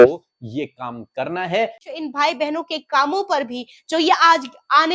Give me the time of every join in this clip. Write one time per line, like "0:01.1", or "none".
0:01.8